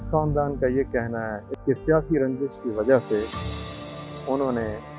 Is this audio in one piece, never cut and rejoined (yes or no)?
no